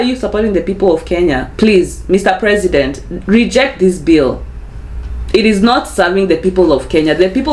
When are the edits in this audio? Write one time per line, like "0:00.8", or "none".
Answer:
0:01.5